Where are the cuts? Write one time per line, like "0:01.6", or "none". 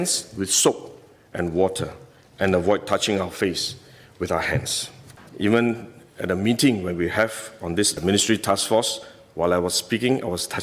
0:05.2